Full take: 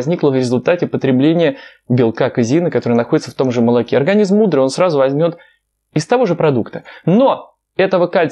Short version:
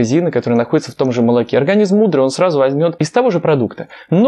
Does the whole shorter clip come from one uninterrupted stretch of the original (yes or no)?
no